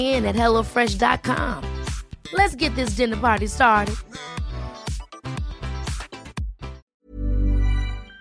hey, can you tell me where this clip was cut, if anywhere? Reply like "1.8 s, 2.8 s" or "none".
6.8 s